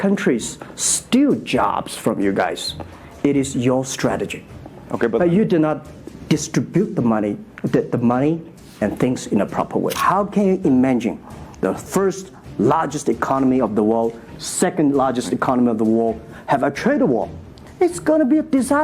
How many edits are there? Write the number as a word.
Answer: one